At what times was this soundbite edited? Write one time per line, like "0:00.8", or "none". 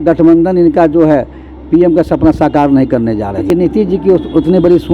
0:03.5